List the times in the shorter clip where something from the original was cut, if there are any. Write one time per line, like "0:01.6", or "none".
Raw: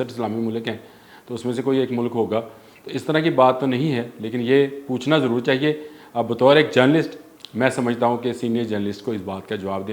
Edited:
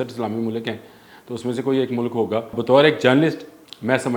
0:02.6